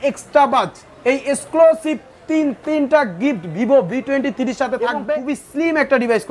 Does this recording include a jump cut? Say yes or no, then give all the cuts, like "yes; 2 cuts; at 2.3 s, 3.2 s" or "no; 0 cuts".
yes; 1 cut; at 5.0 s